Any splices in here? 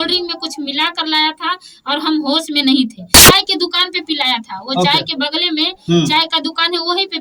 yes; 1 cut; at 3.2 s

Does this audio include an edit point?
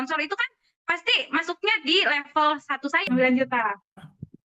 yes; 1 cut; at 3.1 s

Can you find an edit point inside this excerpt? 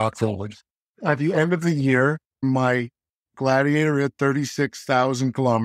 yes; 1 cut; at 2.3 s

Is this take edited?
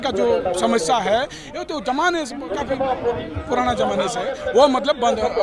no; 0 cuts

